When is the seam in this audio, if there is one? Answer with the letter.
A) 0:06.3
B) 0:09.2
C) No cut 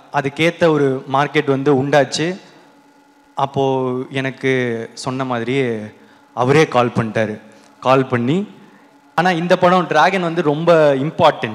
B